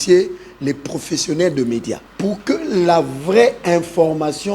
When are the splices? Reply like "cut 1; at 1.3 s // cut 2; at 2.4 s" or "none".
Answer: cut 1; at 2.1 s